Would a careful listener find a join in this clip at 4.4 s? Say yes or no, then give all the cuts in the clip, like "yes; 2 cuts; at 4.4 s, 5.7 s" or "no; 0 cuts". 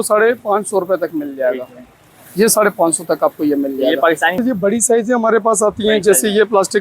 yes; 1 cut; at 4.4 s